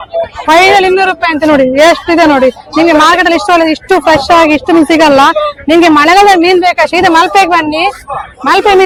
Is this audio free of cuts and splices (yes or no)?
yes